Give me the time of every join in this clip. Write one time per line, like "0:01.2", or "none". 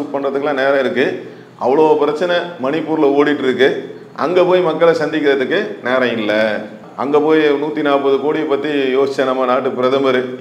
none